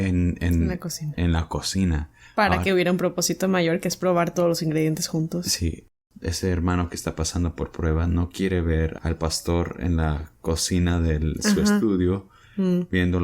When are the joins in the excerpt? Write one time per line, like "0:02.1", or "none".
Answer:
0:06.0
0:09.0